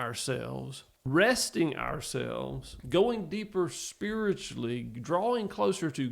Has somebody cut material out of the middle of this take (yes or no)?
yes